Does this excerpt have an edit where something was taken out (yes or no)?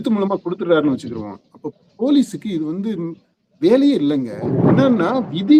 yes